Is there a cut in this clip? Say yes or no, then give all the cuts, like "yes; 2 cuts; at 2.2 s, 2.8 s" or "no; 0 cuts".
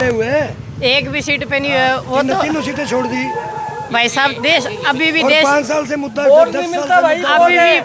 no; 0 cuts